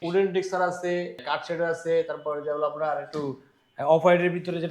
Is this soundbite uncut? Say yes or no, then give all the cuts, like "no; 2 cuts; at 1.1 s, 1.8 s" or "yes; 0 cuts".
no; 1 cut; at 1.2 s